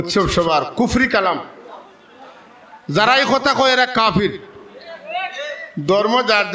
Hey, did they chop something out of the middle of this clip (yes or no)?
no